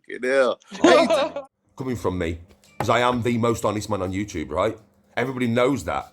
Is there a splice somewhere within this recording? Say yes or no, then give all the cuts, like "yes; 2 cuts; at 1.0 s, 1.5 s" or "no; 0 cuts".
yes; 1 cut; at 1.3 s